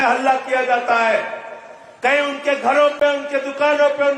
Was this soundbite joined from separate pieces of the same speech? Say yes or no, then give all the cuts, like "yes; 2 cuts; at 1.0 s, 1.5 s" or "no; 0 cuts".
no; 0 cuts